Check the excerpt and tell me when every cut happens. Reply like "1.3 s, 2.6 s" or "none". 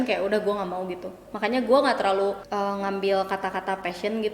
2.4 s